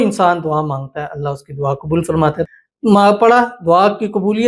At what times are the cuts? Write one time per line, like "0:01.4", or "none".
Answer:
0:02.5